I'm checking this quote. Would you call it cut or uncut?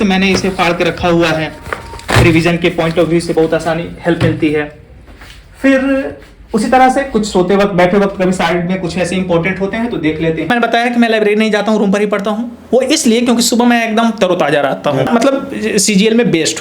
cut